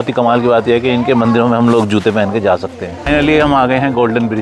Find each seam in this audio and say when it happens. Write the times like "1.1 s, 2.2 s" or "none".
3.1 s